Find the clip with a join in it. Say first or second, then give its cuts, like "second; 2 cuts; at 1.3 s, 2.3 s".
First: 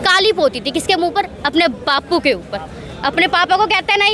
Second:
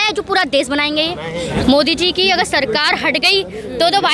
second; 1 cut; at 1.5 s